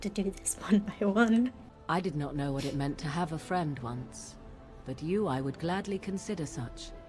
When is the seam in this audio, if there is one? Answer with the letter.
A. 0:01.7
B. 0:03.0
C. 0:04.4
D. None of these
A